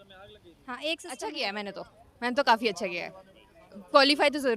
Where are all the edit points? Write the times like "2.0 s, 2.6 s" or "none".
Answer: 1.2 s